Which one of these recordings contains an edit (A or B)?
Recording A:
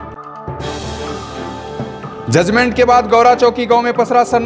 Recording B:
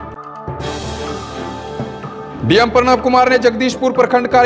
B